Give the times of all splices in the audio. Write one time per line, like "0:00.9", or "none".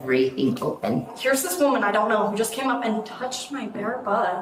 0:01.1